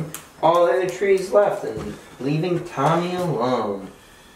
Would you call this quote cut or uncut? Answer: uncut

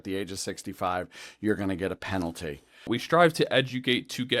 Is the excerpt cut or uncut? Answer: cut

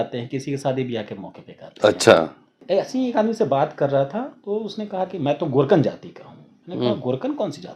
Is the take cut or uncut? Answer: cut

